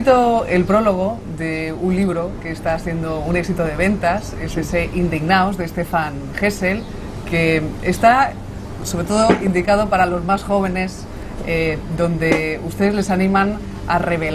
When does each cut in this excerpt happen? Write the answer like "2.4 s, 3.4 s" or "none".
none

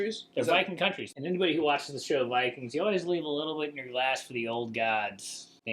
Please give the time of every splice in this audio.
1.1 s

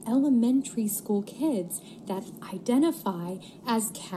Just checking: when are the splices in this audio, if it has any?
none

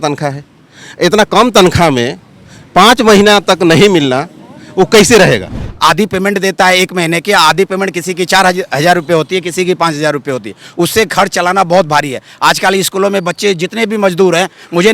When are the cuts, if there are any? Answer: 5.6 s

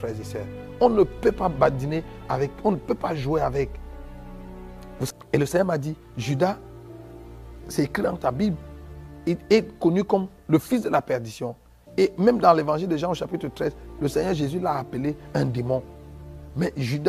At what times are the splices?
5.1 s

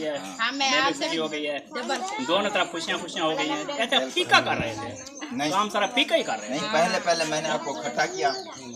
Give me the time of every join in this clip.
none

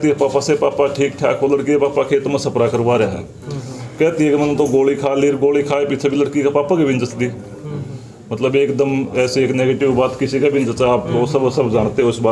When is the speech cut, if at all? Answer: none

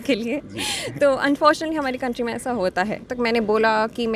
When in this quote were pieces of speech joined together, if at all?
3.1 s

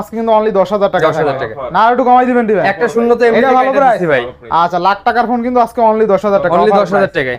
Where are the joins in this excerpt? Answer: none

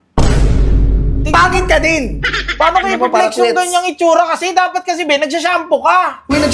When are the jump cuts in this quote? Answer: none

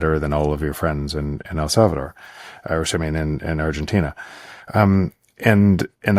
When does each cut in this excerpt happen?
none

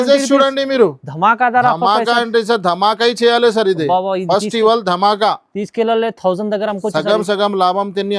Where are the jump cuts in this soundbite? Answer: none

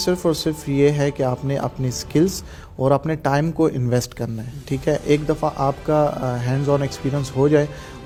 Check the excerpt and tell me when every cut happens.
none

